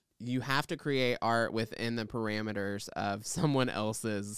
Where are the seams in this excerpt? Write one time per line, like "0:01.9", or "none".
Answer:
none